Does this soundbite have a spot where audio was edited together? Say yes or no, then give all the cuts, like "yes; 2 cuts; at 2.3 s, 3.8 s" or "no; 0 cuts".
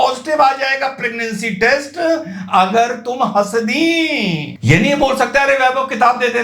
yes; 1 cut; at 4.4 s